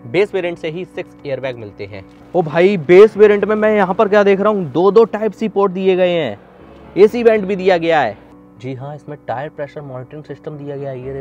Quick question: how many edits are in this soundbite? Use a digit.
2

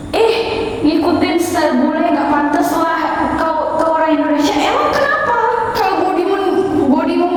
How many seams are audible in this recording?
0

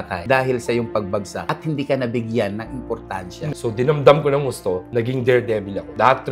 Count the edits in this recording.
1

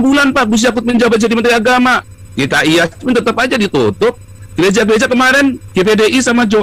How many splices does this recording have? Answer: 0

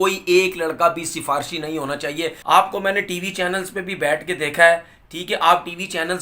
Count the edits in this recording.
1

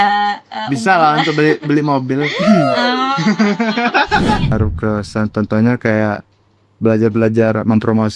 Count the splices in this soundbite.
1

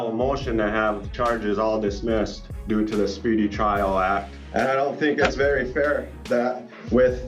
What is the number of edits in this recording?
2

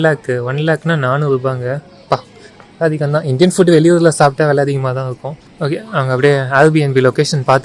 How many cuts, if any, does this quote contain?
0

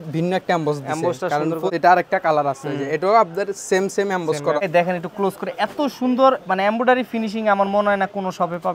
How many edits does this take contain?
2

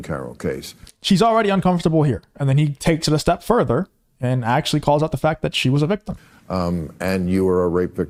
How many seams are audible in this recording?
0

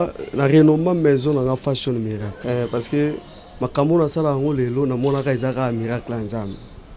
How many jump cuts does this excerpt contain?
1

